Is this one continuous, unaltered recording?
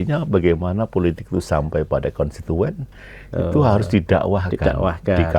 yes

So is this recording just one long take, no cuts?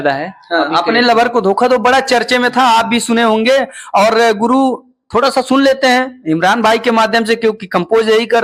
yes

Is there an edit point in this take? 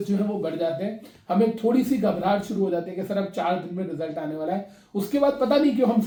no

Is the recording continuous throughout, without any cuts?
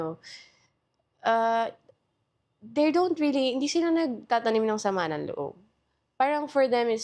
yes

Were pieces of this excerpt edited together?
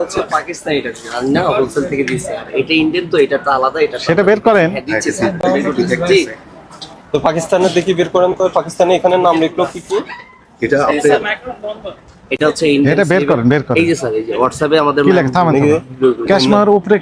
no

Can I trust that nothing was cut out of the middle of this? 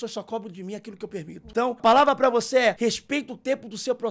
no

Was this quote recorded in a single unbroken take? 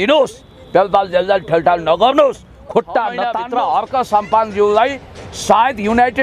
no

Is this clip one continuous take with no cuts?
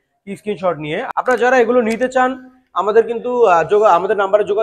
no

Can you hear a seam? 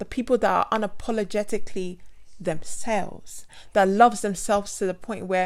no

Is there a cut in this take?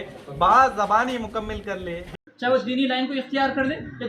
yes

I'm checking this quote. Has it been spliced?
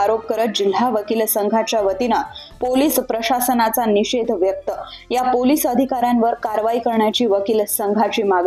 no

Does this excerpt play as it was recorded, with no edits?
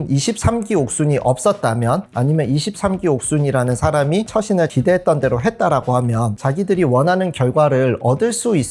no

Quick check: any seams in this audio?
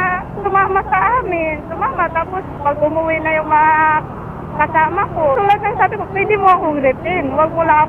yes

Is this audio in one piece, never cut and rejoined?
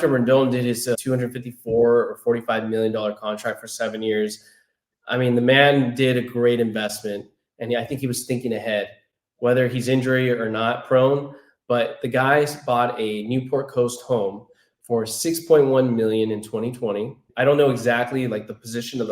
no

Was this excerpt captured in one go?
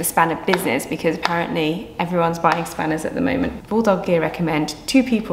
no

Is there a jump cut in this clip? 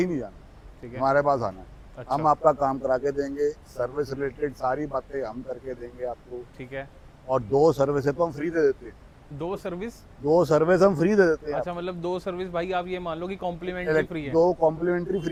no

